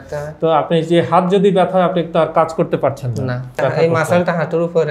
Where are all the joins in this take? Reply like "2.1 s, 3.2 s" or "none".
3.6 s